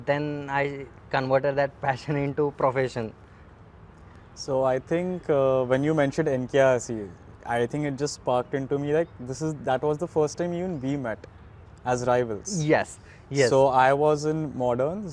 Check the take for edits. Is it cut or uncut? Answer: uncut